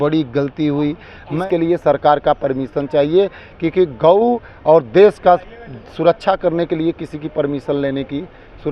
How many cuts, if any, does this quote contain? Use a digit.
1